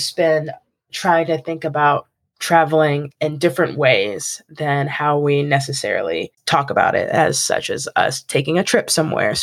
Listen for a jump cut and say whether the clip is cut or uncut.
cut